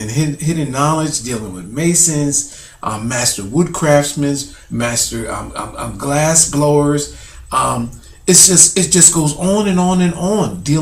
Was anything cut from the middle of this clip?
yes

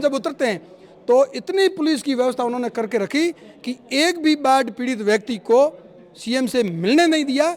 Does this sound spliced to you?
no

